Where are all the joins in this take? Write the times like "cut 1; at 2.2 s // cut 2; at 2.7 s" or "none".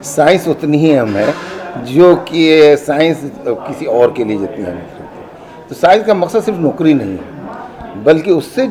none